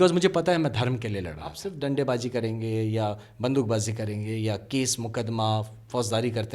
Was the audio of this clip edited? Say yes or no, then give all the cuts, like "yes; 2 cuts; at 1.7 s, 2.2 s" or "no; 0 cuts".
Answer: yes; 1 cut; at 1.7 s